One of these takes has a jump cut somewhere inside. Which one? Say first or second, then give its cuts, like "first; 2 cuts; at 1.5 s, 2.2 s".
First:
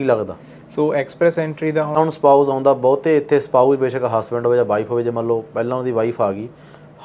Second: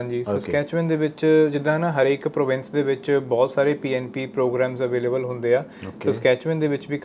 first; 1 cut; at 2.0 s